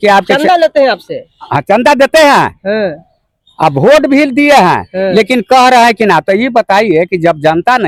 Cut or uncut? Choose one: uncut